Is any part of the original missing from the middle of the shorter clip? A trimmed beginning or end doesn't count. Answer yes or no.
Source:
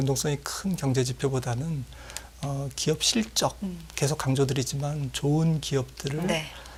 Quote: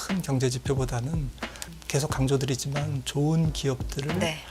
yes